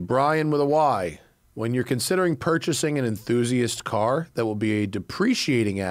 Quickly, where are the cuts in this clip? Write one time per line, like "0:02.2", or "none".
none